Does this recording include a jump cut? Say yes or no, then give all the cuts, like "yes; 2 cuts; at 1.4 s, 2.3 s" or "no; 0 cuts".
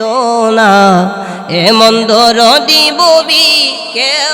no; 0 cuts